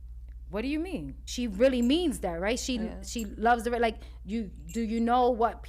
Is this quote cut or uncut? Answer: cut